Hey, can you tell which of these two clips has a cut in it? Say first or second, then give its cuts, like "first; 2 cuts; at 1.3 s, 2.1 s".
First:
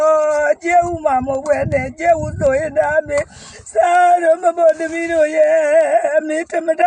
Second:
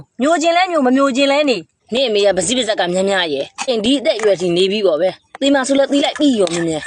second; 2 cuts; at 1.7 s, 3.7 s